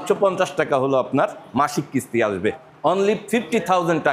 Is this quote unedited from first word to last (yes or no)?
no